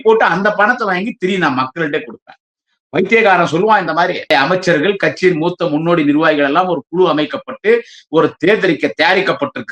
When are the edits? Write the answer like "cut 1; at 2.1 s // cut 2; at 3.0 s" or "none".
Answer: cut 1; at 4.3 s